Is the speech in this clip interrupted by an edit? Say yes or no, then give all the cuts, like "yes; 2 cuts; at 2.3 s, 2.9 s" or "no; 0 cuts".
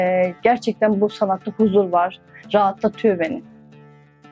no; 0 cuts